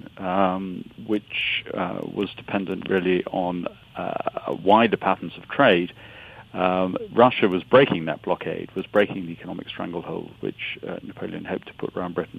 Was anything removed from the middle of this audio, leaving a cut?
yes; 1 cut; at 2.1 s

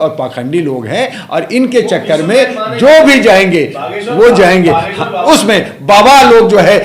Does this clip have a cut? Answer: yes; 1 cut; at 5.3 s

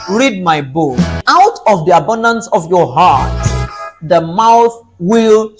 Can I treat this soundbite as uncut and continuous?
no; 1 cut; at 1.2 s

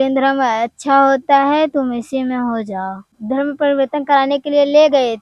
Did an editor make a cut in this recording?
yes; 1 cut; at 3.1 s

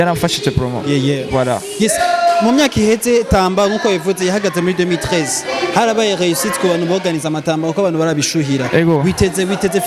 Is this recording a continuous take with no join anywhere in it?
yes; 0 cuts

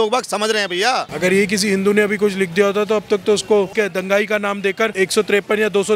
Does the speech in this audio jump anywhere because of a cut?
yes; 3 cuts; at 1.1 s, 3.7 s, 4.9 s

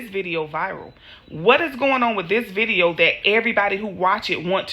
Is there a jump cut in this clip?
no; 0 cuts

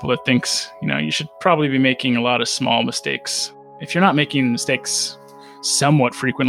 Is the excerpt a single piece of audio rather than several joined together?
yes; 0 cuts

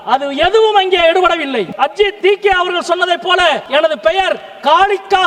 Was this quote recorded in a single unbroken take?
no; 2 cuts; at 1.8 s, 3.6 s

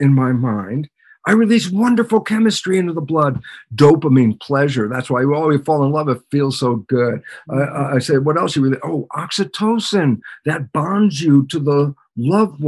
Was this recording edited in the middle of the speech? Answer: no; 0 cuts

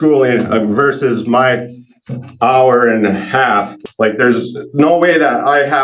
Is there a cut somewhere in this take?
yes; 1 cut; at 3.7 s

